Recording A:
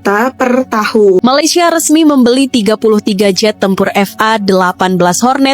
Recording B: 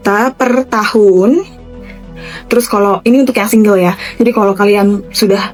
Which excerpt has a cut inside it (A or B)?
A